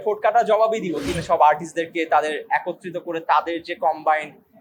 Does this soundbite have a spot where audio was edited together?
yes; 1 cut; at 1.1 s

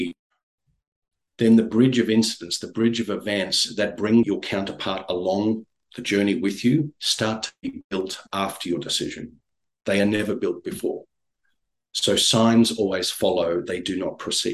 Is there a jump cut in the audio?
yes; 1 cut; at 4.3 s

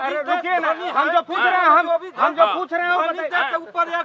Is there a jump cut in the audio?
no; 0 cuts

